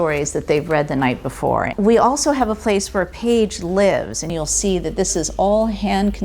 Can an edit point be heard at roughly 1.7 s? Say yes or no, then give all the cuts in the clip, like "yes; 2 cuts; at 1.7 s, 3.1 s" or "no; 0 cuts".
yes; 2 cuts; at 1.7 s, 4.3 s